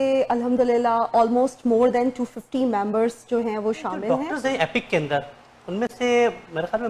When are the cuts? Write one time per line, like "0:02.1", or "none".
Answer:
0:04.2